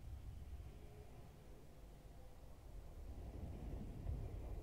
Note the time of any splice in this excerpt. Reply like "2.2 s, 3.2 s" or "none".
none